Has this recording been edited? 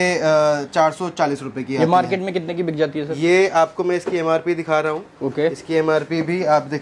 no; 0 cuts

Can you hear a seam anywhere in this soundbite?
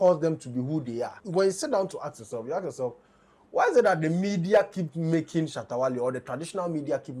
yes; 1 cut; at 1.2 s

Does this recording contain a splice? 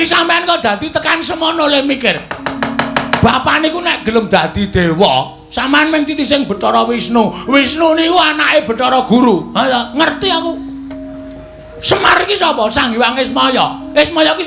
no; 0 cuts

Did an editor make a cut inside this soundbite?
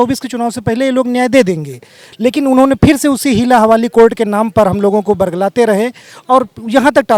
no; 0 cuts

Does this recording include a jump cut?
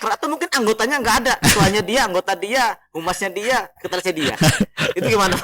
no; 0 cuts

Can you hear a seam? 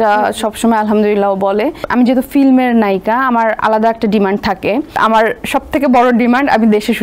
yes; 2 cuts; at 1.8 s, 5.0 s

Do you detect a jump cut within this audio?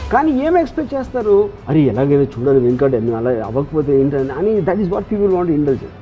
no; 0 cuts

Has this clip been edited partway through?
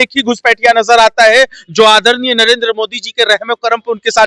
no; 0 cuts

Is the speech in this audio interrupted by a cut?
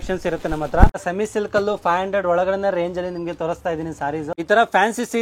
yes; 2 cuts; at 1.0 s, 4.3 s

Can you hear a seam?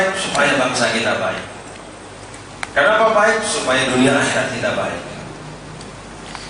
no; 0 cuts

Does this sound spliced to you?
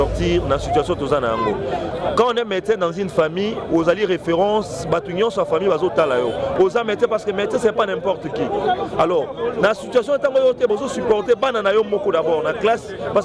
yes; 1 cut; at 6.5 s

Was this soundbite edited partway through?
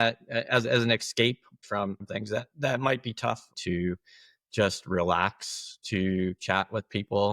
yes; 2 cuts; at 1.6 s, 3.6 s

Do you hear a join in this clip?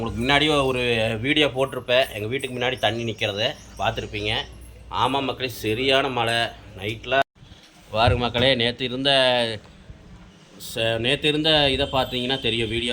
yes; 1 cut; at 7.2 s

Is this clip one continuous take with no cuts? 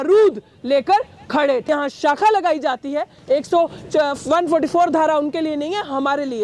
no; 1 cut; at 1.7 s

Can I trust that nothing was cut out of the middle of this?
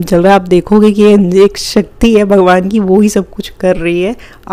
yes; 0 cuts

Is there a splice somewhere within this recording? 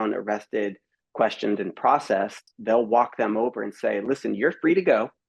yes; 1 cut; at 2.5 s

